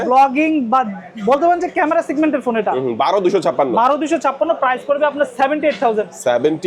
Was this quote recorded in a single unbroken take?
yes; 0 cuts

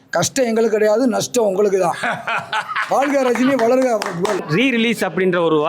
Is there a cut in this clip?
yes; 1 cut; at 4.4 s

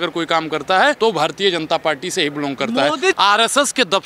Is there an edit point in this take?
yes; 2 cuts; at 1.0 s, 3.1 s

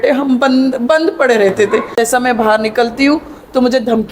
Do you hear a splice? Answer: yes; 1 cut; at 1.9 s

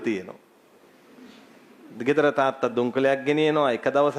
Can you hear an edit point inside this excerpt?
no; 0 cuts

